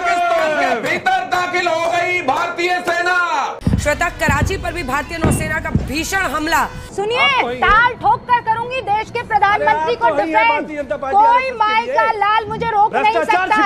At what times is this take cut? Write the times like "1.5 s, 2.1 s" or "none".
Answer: 3.6 s, 6.8 s